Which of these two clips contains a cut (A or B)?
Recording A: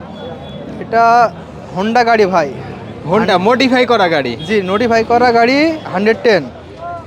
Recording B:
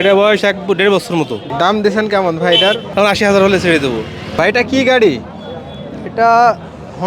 B